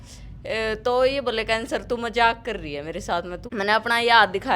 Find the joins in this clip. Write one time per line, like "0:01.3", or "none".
0:03.4